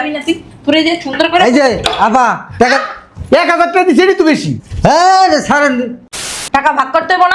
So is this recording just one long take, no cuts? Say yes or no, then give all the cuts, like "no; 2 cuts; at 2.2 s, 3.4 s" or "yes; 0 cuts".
no; 1 cut; at 6.3 s